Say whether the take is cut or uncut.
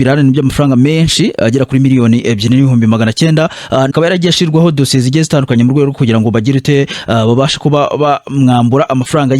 cut